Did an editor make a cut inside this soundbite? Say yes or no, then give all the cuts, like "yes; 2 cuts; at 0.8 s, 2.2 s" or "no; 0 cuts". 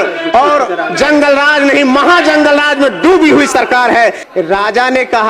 yes; 1 cut; at 4.2 s